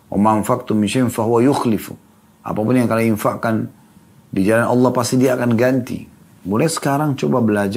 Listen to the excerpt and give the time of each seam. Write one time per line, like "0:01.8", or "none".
0:06.3